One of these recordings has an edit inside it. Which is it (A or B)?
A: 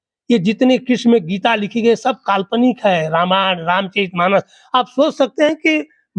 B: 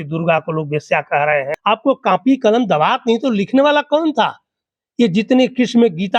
B